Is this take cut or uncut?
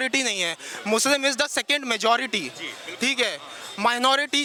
uncut